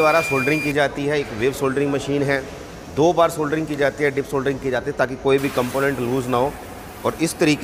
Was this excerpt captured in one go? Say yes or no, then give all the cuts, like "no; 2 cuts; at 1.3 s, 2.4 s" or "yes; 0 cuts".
yes; 0 cuts